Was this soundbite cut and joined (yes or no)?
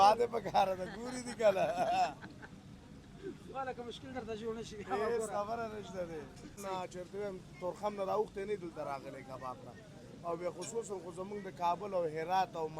yes